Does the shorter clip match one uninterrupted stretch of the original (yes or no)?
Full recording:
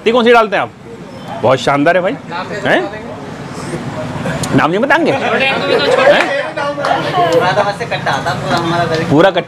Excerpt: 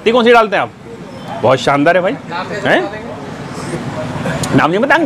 yes